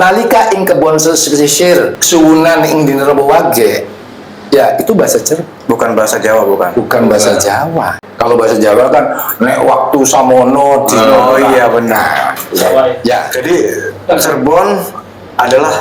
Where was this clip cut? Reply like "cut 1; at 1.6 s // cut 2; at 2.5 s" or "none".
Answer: cut 1; at 2.0 s // cut 2; at 8.0 s // cut 3; at 13.3 s